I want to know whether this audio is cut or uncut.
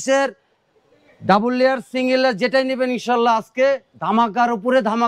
uncut